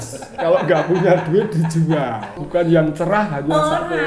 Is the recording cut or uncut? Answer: cut